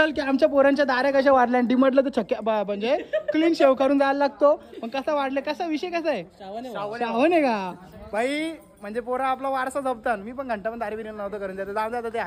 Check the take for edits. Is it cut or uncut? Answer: uncut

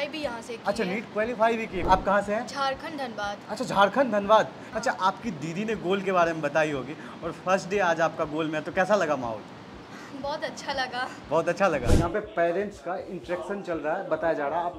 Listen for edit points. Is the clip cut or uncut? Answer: cut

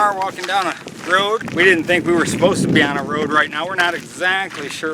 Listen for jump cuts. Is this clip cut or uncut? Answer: cut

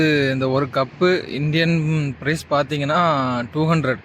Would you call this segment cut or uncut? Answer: uncut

